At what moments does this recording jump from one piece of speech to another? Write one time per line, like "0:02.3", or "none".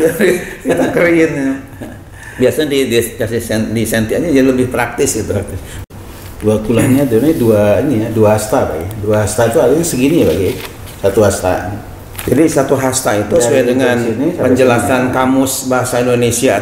0:05.7